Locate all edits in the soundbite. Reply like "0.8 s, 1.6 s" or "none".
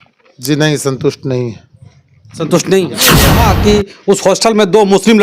3.5 s